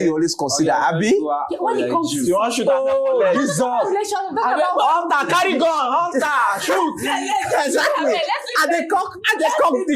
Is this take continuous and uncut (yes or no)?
yes